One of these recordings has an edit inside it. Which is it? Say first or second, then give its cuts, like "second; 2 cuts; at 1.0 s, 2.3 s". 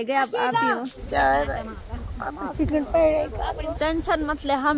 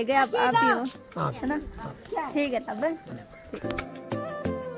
first; 2 cuts; at 1.0 s, 3.6 s